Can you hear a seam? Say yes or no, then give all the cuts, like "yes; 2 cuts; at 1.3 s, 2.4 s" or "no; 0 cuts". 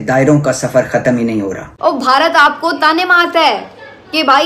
yes; 1 cut; at 1.7 s